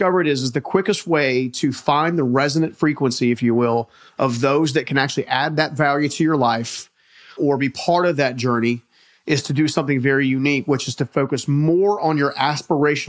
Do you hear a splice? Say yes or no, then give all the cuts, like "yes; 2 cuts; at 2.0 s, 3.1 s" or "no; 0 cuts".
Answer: yes; 1 cut; at 7.3 s